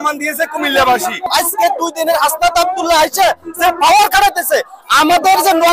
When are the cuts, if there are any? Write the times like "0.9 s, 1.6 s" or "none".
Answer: 1.3 s